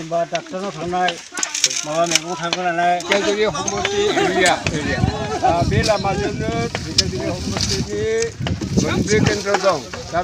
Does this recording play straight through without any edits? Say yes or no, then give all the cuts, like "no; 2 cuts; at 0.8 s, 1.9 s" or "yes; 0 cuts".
no; 1 cut; at 3.0 s